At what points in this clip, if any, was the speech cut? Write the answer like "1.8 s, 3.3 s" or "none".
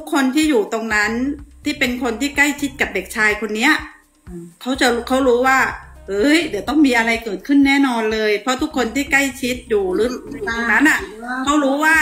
none

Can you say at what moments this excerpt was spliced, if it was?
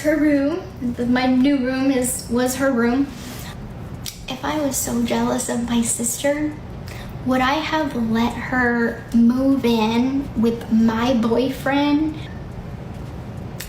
3.5 s, 12.4 s

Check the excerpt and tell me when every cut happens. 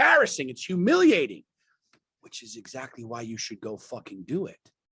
none

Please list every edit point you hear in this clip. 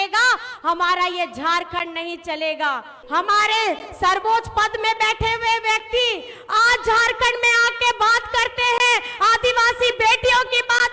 2.9 s

